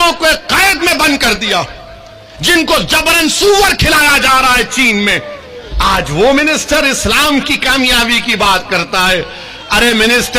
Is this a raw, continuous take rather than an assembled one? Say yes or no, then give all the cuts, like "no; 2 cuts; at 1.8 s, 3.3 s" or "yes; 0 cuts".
yes; 0 cuts